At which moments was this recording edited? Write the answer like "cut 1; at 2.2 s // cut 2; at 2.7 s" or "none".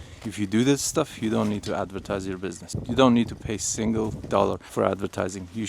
cut 1; at 2.7 s // cut 2; at 4.6 s